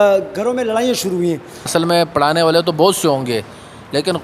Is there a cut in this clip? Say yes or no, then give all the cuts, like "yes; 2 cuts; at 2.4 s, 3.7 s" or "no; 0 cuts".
yes; 1 cut; at 1.7 s